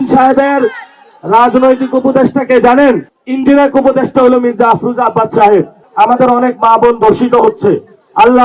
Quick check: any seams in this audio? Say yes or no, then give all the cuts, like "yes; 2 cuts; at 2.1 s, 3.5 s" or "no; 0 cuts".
yes; 2 cuts; at 3.2 s, 5.8 s